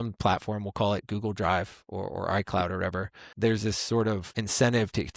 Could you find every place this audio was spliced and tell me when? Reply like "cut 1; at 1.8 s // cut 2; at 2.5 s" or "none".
cut 1; at 3.3 s // cut 2; at 4.3 s